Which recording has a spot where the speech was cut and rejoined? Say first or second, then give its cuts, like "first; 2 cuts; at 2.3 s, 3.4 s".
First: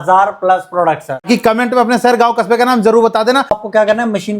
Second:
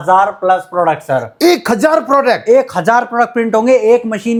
first; 2 cuts; at 1.3 s, 3.6 s